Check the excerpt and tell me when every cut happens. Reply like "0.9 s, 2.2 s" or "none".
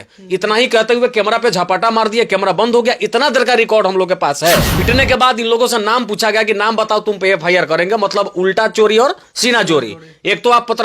4.7 s